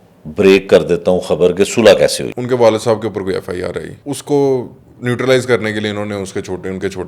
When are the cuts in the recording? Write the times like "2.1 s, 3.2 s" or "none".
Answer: 2.3 s, 3.9 s